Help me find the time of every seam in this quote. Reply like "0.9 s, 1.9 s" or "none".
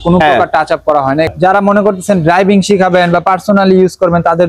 1.3 s